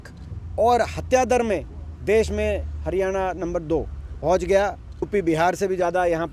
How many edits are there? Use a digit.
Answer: 2